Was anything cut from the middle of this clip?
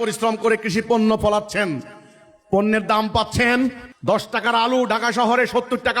yes; 1 cut; at 3.9 s

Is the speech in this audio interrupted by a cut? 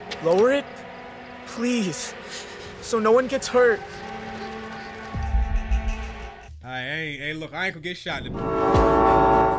yes; 1 cut; at 8.5 s

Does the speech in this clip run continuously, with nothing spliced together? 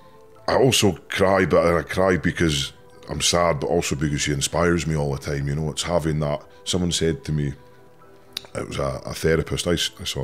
yes; 0 cuts

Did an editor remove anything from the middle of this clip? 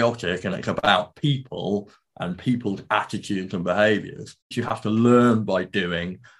yes; 1 cut; at 4.6 s

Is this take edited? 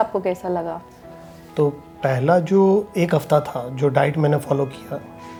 no; 0 cuts

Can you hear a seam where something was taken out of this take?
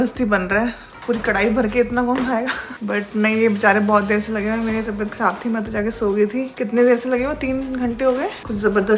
no; 0 cuts

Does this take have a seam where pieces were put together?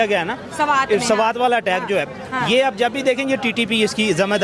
no; 0 cuts

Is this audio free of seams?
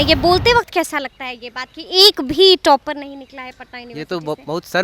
yes; 0 cuts

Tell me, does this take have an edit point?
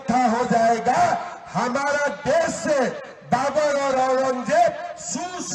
no; 0 cuts

